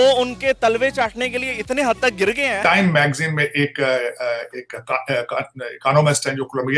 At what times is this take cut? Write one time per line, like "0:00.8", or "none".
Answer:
0:02.6